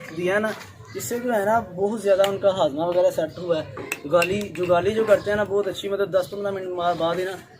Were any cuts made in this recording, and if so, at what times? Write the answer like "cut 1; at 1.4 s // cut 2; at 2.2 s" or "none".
none